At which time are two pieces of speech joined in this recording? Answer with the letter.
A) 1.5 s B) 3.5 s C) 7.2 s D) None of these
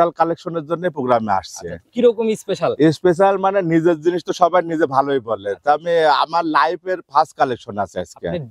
D